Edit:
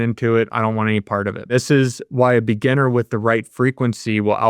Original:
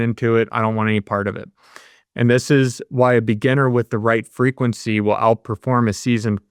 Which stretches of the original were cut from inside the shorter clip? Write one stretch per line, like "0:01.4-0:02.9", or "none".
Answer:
0:01.5-0:02.3